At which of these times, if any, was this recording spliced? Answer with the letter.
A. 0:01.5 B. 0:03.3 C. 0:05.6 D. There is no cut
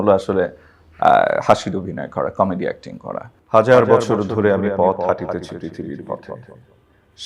B